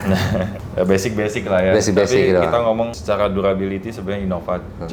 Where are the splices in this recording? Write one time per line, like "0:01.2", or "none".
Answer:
none